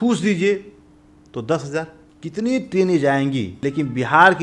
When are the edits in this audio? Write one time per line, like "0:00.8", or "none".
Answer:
0:02.0
0:03.5